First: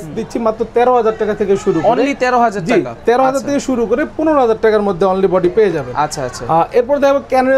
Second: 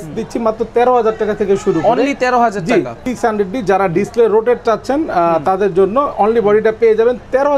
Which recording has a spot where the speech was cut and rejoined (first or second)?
second